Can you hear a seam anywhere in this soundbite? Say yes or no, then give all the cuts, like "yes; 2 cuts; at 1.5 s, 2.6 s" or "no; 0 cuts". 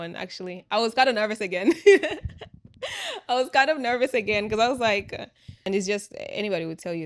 yes; 1 cut; at 5.6 s